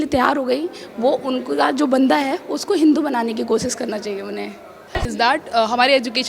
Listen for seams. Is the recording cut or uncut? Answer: cut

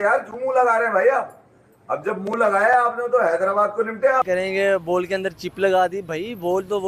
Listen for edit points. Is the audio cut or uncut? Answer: cut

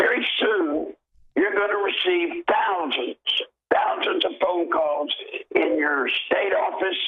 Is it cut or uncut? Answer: uncut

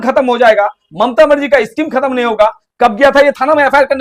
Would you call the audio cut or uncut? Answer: uncut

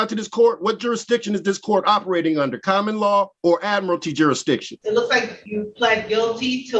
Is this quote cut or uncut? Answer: cut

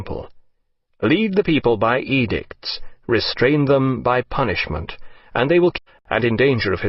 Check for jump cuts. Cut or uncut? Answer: uncut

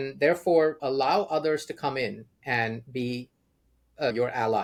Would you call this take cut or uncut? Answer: uncut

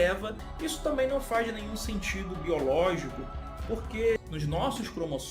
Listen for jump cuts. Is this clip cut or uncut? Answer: cut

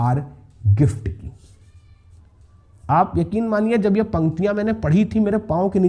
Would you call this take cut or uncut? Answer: uncut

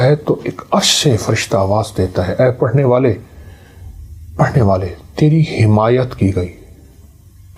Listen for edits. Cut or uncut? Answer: uncut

